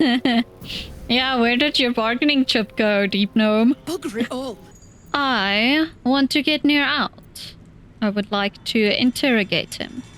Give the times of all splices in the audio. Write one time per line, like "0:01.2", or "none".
0:04.6